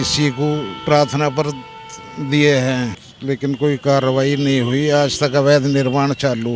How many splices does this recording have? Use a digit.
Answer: 1